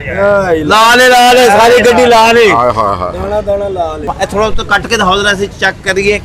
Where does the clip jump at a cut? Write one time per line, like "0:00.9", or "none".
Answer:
0:04.1